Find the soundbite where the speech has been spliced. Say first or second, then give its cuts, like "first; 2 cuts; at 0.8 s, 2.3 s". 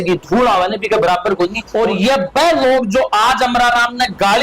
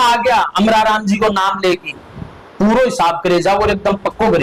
first; 1 cut; at 1.6 s